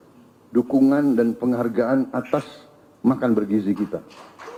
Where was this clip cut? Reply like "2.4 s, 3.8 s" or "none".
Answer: none